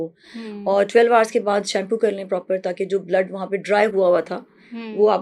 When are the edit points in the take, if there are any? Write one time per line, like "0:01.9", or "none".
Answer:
none